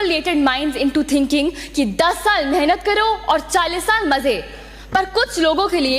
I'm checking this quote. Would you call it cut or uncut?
uncut